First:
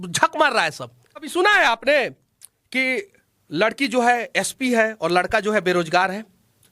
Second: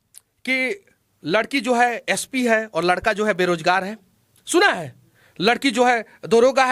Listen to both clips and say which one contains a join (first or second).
first